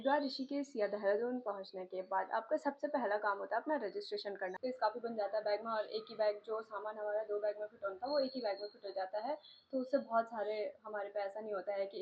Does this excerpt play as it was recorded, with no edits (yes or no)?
no